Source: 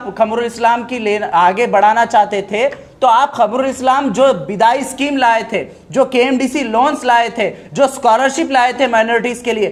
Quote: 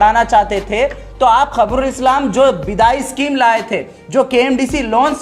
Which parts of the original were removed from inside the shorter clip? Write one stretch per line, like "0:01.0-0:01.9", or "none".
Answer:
none

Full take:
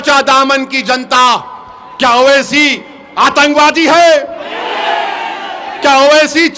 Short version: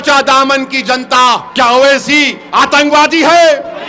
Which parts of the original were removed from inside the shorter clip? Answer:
0:01.5-0:01.9
0:02.8-0:03.0

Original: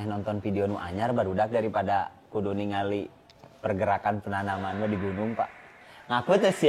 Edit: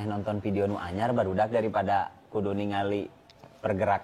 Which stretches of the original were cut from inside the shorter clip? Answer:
none

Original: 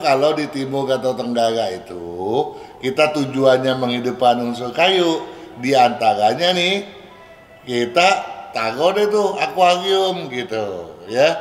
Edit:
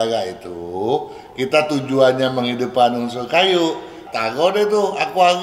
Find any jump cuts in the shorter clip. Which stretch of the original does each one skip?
0:05.4-0:08.4

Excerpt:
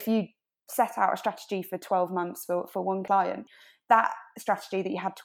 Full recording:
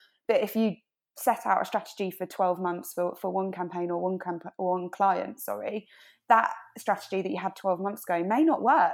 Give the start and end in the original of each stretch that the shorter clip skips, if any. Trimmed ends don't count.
0:03.7-0:05.6

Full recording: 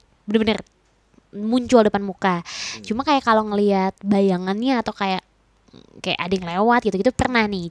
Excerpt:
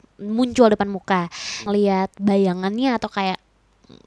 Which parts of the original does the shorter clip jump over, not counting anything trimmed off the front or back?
0:02.8-0:03.5

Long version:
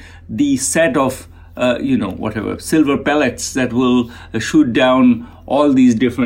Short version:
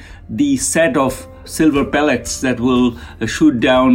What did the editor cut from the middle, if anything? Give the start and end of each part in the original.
0:01.4-0:02.6

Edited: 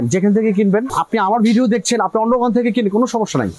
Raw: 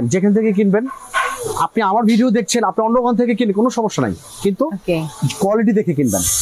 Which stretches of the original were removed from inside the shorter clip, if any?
0:01.0-0:01.6

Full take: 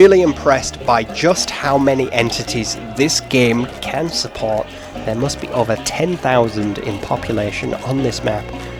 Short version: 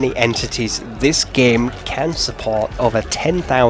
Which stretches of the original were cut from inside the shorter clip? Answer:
0:04.7-0:05.5

